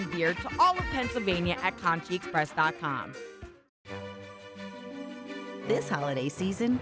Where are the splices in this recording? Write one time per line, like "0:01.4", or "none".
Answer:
0:03.4